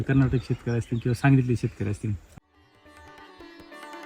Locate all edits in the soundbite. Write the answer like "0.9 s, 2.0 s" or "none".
2.2 s